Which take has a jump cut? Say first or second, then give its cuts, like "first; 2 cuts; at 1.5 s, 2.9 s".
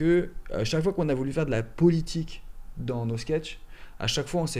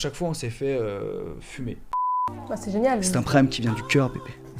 second; 1 cut; at 1.9 s